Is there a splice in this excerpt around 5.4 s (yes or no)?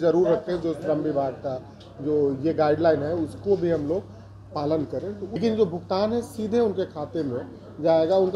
yes